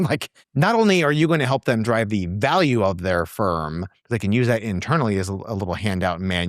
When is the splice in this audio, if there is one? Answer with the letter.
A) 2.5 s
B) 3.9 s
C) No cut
B